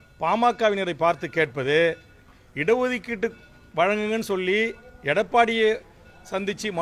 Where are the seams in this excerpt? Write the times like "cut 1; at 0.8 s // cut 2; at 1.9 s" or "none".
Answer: none